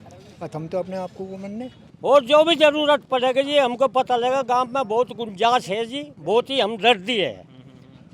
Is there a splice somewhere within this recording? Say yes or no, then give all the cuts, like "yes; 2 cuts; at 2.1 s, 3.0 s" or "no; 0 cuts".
yes; 1 cut; at 1.8 s